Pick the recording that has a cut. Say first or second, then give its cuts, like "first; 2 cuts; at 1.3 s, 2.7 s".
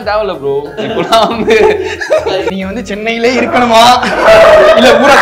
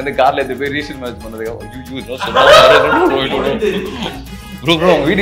first; 1 cut; at 2.5 s